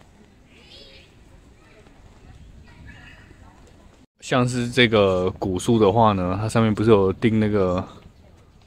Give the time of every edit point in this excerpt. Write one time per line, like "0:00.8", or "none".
0:03.9